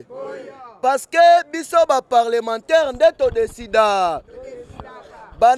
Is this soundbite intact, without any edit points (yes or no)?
yes